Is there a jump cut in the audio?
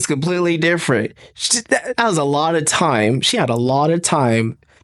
no; 0 cuts

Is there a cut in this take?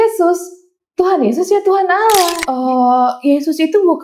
yes; 1 cut; at 2.4 s

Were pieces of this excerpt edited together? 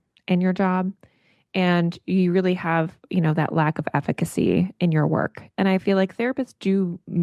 no; 0 cuts

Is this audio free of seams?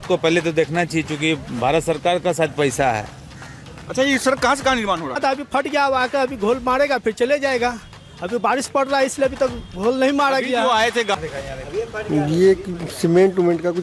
no; 2 cuts; at 5.2 s, 11.1 s

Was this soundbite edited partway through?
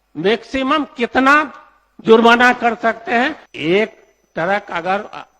yes; 1 cut; at 3.4 s

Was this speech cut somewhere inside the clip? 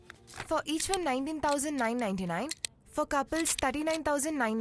no; 0 cuts

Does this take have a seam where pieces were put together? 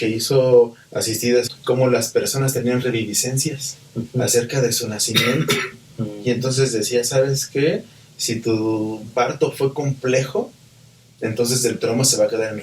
yes; 1 cut; at 1.5 s

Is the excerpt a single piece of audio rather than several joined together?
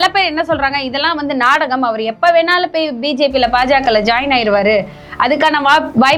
yes; 0 cuts

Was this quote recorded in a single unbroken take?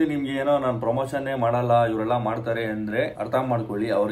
no; 1 cut; at 3.2 s

